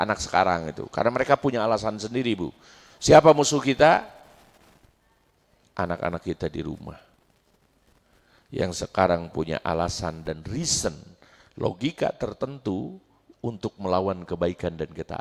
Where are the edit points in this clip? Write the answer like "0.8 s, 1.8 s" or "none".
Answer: none